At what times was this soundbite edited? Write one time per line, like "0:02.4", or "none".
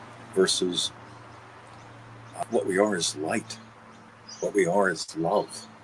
0:02.4